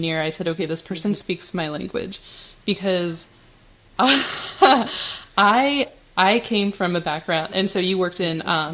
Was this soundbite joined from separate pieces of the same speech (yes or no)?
no